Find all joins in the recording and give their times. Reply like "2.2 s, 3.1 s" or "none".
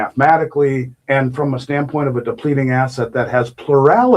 0.9 s